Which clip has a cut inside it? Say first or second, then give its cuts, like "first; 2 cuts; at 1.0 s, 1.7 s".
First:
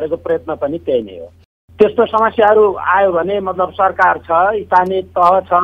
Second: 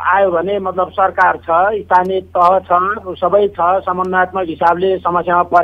first; 1 cut; at 1.6 s